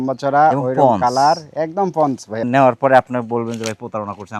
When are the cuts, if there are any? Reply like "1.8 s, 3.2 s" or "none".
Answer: 2.4 s